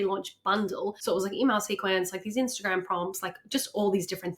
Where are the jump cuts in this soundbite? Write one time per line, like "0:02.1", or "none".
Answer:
0:01.0